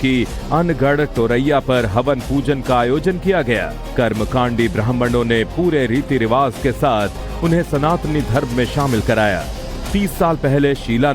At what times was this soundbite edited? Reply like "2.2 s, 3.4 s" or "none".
5.5 s

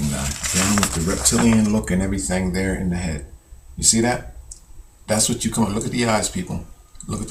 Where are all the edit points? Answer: none

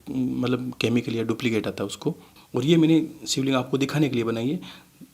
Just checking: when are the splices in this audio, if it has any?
2.3 s

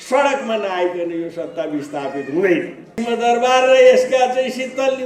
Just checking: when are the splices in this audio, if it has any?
3.0 s

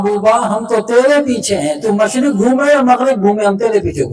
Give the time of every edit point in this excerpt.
none

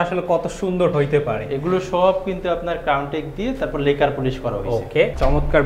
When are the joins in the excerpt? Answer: none

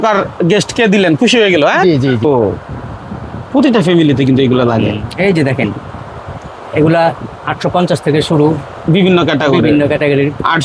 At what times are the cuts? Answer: 2.2 s

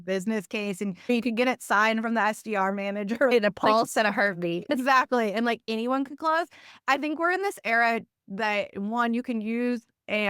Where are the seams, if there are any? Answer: 1.1 s, 3.3 s, 4.6 s

